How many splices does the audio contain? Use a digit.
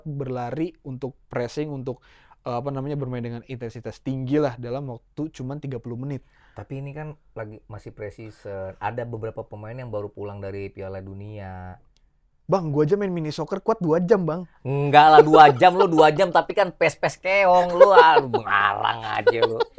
0